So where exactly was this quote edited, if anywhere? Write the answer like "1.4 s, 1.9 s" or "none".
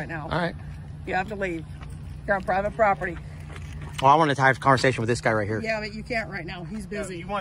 none